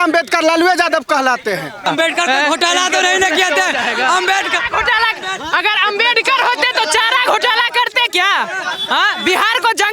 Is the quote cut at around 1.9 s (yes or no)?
yes